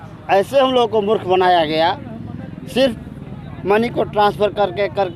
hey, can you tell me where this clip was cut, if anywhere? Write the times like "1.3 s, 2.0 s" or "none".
none